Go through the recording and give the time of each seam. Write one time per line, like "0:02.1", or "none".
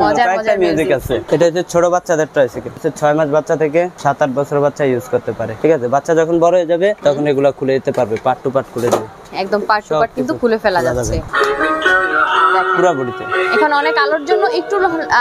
0:01.2
0:02.8
0:03.9
0:05.5
0:07.0
0:09.3
0:11.2